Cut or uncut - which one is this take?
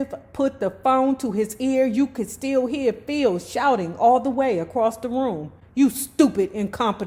uncut